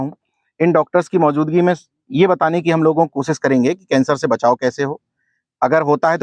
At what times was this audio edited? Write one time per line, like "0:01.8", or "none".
none